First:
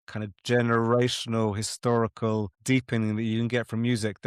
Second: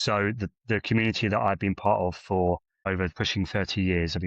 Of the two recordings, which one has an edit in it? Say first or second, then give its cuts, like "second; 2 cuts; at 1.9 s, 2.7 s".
second; 1 cut; at 3.0 s